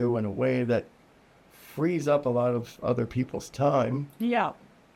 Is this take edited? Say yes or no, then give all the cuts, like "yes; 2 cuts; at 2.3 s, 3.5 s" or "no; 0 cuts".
no; 0 cuts